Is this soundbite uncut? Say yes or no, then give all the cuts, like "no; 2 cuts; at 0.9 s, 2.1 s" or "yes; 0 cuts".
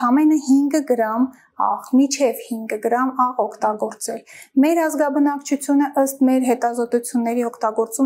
yes; 0 cuts